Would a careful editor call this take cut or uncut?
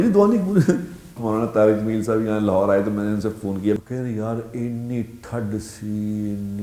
cut